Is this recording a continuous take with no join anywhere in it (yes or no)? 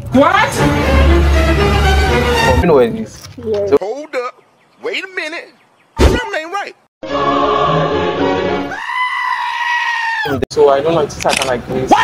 no